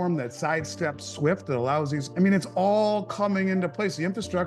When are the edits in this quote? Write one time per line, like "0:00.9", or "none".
0:02.0